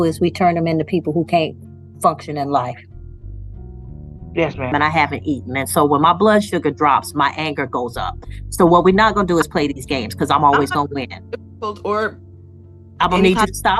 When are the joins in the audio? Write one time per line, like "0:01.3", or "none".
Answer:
0:04.7